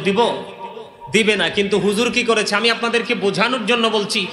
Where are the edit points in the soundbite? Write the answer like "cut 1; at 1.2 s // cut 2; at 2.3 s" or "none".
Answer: none